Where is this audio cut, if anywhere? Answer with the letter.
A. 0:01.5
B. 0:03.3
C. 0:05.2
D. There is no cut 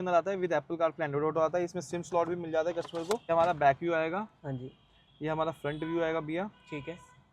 B